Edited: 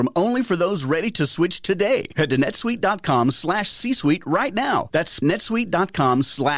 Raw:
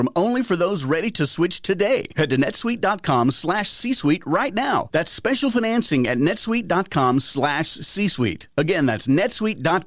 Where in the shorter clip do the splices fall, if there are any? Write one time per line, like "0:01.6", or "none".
0:05.2